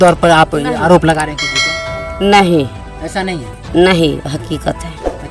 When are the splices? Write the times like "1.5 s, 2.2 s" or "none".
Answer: none